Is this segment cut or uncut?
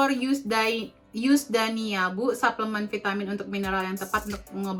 uncut